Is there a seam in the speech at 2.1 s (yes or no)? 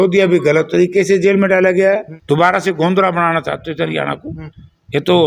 yes